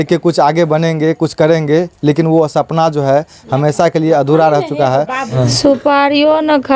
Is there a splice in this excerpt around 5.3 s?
yes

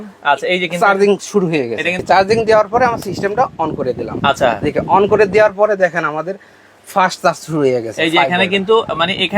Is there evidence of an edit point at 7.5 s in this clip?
no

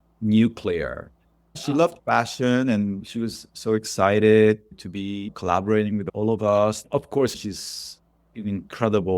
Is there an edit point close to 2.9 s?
no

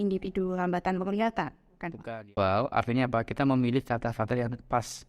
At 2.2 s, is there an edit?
yes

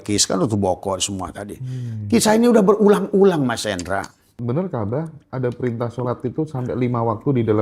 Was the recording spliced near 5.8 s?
no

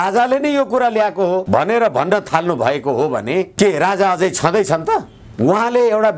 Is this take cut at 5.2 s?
yes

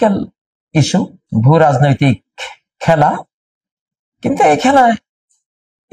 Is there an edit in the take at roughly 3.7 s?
no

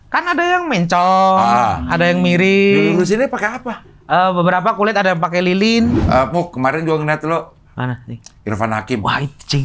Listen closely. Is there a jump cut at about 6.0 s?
yes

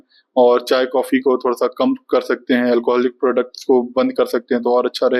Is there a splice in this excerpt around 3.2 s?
no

